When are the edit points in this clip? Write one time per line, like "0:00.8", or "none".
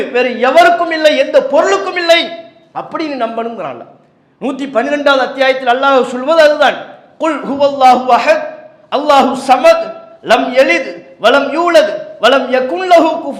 none